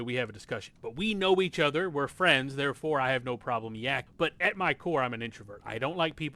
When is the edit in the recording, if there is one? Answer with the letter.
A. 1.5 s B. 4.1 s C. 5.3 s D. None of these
B